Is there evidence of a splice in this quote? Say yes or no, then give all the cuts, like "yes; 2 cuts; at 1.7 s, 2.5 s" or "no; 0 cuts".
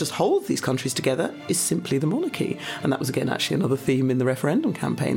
no; 0 cuts